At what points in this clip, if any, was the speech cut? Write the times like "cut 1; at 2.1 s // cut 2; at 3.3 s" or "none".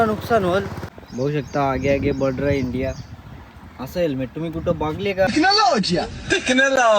cut 1; at 1.0 s // cut 2; at 5.3 s